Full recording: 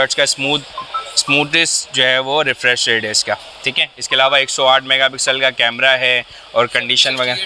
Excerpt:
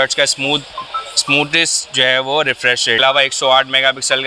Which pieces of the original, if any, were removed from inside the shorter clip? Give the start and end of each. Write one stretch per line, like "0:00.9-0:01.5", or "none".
0:03.0-0:04.2